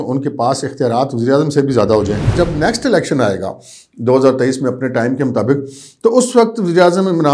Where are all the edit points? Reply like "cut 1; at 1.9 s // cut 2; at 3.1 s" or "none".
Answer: cut 1; at 2.3 s